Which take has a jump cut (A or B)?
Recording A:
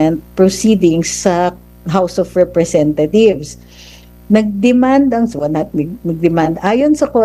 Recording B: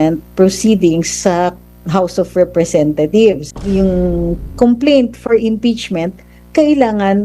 B